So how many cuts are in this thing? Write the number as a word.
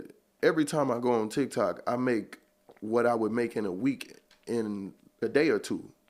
one